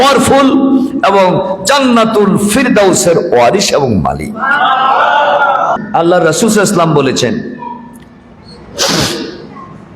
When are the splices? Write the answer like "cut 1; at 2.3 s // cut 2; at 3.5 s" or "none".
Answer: cut 1; at 5.8 s